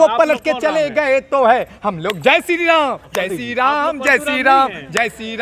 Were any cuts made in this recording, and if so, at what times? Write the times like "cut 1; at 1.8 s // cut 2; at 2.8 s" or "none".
none